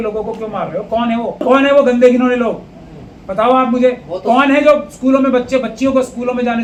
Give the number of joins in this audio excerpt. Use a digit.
0